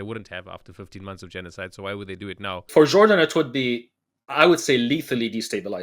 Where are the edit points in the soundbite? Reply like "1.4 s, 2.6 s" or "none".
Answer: 2.7 s